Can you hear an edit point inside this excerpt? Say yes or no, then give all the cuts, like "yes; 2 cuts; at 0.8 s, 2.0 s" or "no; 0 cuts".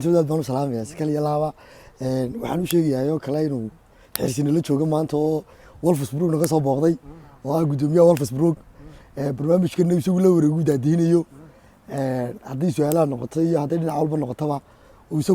no; 0 cuts